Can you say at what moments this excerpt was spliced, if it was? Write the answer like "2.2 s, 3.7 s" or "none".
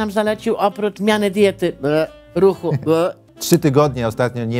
1.0 s, 3.3 s